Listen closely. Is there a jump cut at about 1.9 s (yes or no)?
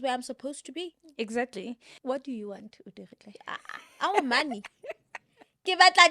yes